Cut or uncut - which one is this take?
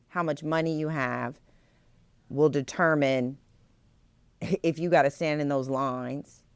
uncut